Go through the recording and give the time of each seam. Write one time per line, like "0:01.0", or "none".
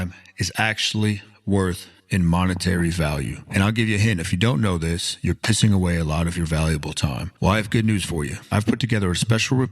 0:01.9